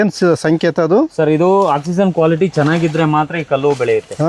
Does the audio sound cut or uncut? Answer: uncut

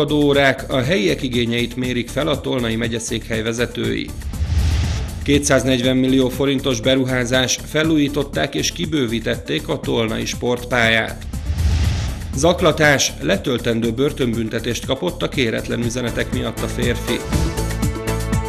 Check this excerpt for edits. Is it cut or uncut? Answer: cut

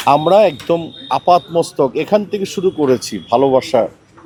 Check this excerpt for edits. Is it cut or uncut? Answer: uncut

